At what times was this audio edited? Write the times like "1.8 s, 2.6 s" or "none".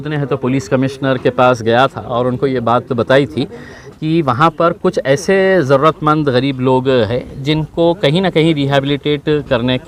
none